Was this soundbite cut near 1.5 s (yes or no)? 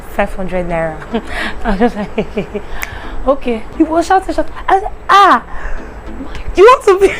no